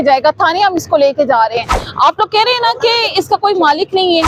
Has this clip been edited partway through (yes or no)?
no